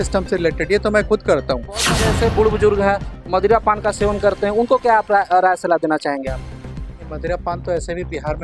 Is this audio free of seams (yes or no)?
no